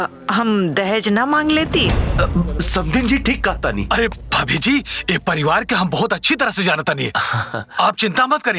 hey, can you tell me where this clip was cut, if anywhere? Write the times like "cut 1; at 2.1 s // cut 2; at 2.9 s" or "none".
none